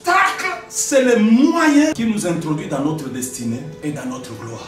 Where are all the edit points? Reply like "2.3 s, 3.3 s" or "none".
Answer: 1.9 s, 3.8 s